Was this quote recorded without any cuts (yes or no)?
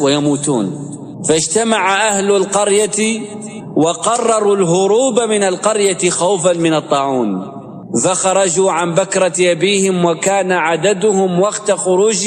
yes